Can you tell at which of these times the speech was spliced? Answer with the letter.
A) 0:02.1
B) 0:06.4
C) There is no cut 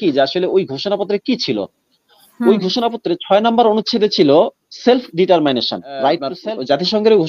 B